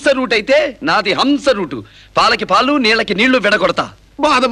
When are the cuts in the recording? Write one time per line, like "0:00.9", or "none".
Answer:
none